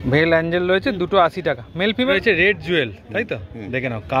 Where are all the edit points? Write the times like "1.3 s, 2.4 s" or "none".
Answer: 2.1 s